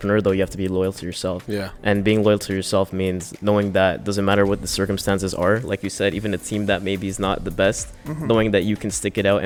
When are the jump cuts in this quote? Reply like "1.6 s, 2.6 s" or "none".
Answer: none